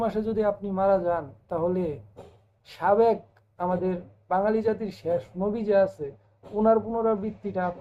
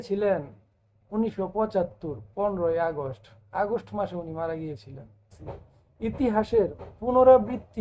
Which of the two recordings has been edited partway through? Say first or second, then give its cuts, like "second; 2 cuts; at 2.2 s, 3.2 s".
second; 1 cut; at 5.4 s